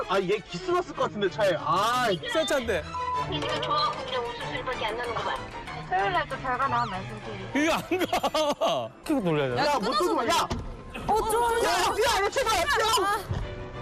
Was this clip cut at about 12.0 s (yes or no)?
no